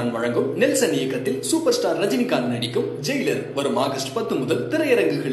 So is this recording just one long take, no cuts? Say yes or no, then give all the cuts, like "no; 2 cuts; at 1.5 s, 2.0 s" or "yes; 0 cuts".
yes; 0 cuts